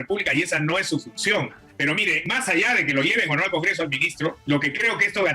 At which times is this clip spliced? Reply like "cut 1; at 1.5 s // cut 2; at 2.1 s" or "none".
cut 1; at 1.6 s